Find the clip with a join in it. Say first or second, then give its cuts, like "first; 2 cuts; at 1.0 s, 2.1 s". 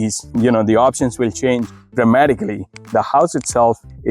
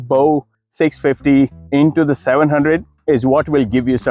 first; 1 cut; at 2.7 s